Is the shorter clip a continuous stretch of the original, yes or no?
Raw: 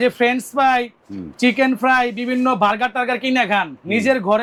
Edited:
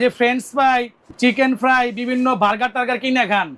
no